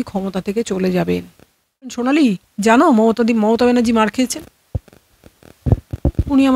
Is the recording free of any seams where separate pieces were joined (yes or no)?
no